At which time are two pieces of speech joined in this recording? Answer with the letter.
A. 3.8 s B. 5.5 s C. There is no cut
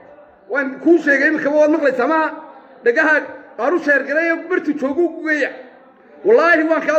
C